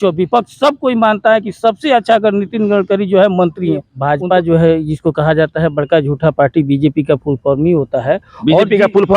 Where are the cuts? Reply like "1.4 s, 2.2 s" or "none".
3.9 s

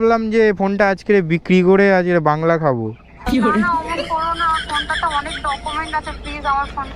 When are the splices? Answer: none

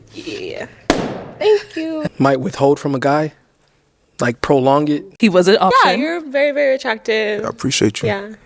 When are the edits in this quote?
2.0 s, 5.1 s

